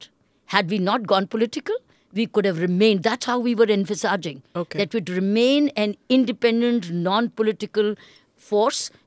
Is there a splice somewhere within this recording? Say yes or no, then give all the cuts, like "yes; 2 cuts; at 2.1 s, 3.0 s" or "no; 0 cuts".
no; 0 cuts